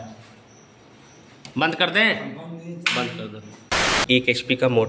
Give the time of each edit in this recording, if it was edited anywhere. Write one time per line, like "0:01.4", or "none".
0:03.9